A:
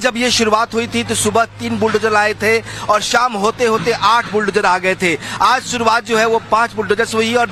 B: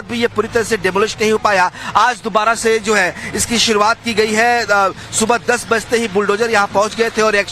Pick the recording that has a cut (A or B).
B